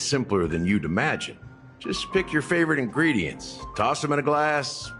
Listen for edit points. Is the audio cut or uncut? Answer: uncut